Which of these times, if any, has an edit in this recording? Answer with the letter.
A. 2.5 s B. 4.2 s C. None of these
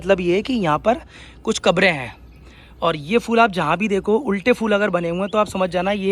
C